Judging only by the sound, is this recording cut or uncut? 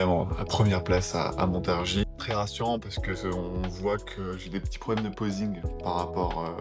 cut